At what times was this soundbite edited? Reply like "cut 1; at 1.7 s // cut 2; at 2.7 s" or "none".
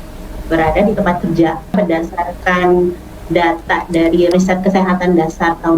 cut 1; at 1.7 s // cut 2; at 4.3 s

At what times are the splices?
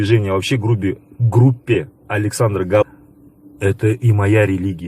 cut 1; at 2.9 s

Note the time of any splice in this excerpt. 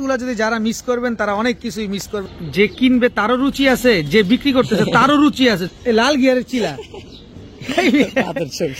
cut 1; at 2.2 s // cut 2; at 5.7 s

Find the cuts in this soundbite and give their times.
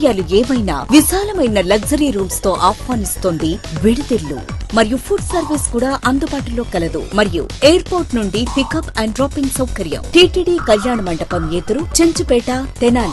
none

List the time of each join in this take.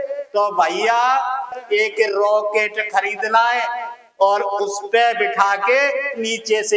cut 1; at 1.5 s

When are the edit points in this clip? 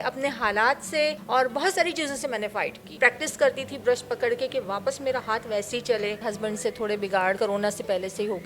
cut 1; at 1.2 s // cut 2; at 2.9 s // cut 3; at 6.2 s // cut 4; at 7.4 s

